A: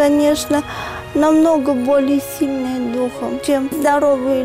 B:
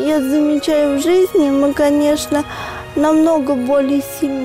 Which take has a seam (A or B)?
A